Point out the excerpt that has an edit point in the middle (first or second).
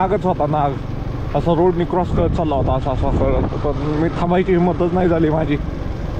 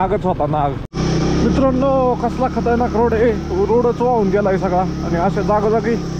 second